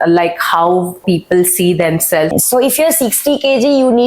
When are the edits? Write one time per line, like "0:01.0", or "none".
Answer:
0:01.0
0:02.3